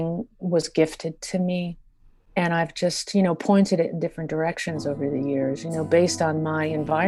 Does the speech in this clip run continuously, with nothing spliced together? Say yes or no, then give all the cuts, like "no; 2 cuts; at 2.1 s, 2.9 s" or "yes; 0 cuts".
yes; 0 cuts